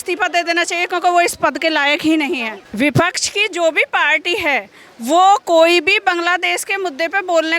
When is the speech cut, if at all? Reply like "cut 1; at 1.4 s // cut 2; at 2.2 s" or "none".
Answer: cut 1; at 2.6 s